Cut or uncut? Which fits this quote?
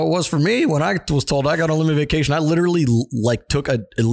uncut